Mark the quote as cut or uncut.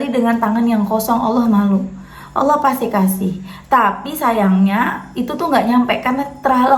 uncut